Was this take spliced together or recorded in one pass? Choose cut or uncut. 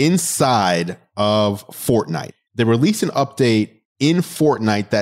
cut